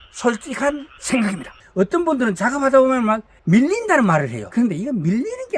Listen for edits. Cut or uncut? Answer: cut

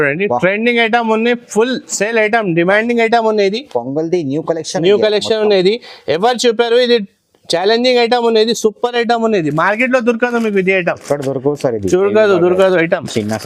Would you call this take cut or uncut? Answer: uncut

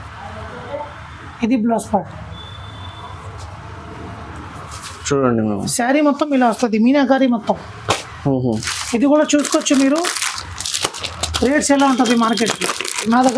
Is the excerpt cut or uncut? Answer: uncut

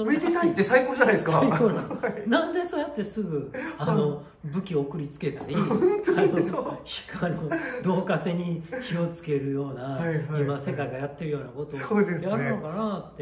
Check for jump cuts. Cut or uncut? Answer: uncut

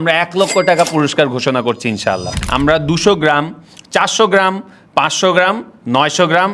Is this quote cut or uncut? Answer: cut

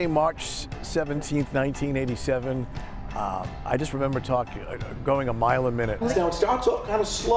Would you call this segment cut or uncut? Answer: cut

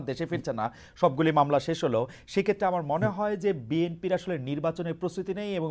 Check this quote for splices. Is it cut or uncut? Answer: uncut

